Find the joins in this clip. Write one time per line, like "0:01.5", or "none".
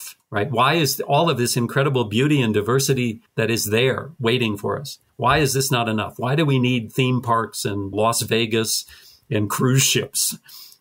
none